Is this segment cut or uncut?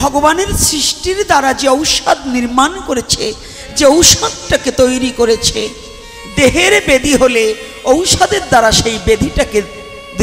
uncut